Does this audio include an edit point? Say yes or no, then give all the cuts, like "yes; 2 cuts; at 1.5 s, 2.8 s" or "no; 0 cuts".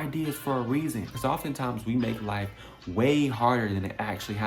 yes; 1 cut; at 1.1 s